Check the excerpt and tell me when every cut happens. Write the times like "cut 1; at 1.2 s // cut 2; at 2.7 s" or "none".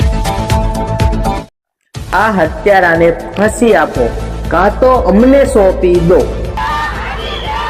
cut 1; at 1.4 s